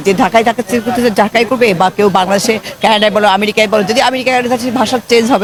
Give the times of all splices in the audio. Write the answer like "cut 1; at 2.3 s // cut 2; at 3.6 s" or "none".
none

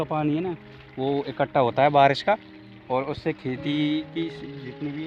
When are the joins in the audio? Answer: none

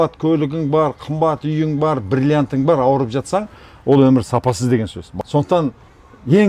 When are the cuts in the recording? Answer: cut 1; at 5.0 s

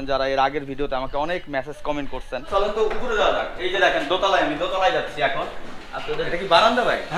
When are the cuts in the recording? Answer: cut 1; at 2.4 s // cut 2; at 6.3 s

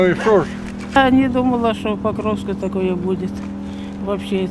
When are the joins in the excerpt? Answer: cut 1; at 1.0 s

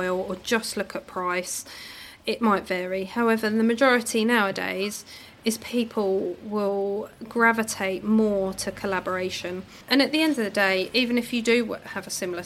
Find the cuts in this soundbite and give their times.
cut 1; at 9.7 s

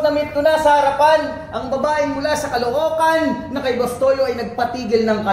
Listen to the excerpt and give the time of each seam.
none

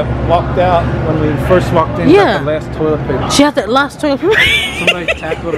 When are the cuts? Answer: cut 1; at 3.2 s

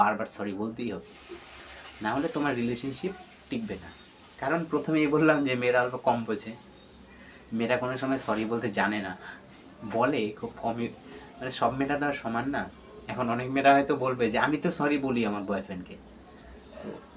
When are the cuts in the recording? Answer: none

